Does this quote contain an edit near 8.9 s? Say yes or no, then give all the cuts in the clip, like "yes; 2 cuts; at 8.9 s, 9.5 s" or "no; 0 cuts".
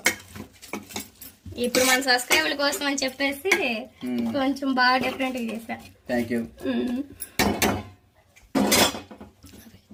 no; 0 cuts